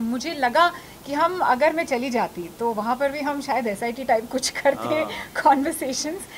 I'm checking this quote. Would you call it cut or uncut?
uncut